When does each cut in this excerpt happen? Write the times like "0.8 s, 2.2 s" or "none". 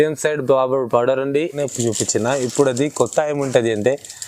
1.6 s